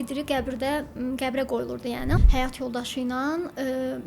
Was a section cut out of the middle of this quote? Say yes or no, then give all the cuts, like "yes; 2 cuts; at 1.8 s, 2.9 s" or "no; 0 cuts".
yes; 1 cut; at 2.2 s